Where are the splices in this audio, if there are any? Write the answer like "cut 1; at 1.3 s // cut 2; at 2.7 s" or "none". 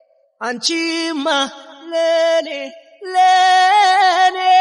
none